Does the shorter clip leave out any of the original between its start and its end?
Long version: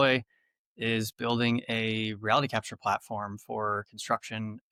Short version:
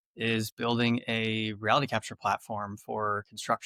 no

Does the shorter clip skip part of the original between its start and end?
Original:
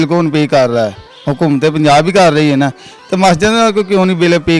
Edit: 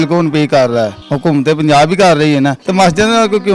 yes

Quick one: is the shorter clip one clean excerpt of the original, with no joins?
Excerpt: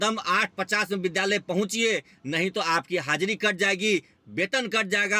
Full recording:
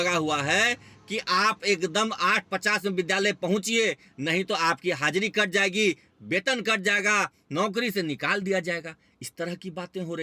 yes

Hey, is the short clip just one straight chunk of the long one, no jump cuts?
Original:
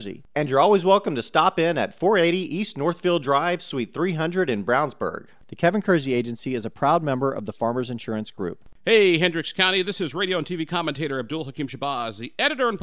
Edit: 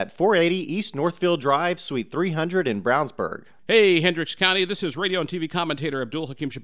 no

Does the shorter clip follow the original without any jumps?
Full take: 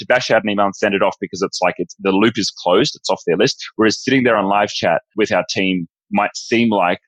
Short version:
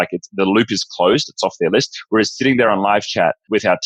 yes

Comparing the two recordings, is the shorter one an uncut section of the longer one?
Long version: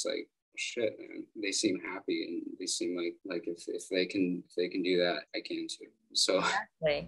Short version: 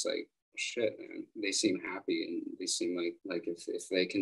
yes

